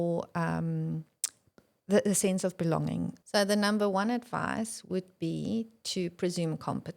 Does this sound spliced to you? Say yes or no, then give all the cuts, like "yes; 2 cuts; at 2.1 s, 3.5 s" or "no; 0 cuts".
yes; 1 cut; at 3.2 s